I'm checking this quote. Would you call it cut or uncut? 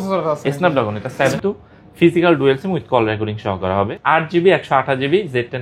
cut